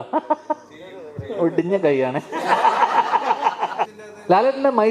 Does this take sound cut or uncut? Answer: cut